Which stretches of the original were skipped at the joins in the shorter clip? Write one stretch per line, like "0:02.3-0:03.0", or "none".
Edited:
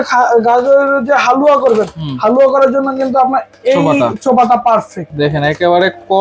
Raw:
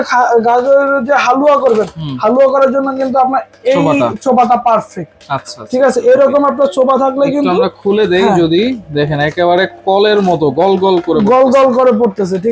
0:05.1-0:08.8